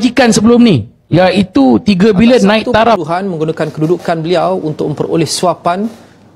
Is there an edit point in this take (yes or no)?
yes